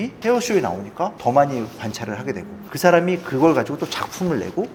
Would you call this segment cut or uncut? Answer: uncut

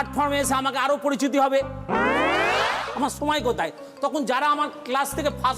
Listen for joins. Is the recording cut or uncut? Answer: cut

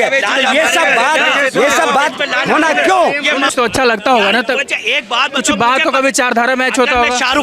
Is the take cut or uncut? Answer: cut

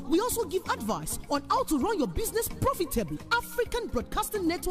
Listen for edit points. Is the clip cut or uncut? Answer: uncut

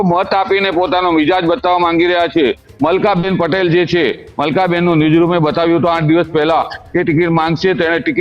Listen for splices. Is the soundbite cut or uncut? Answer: cut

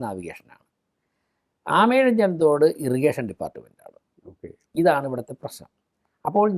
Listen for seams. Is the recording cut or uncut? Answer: uncut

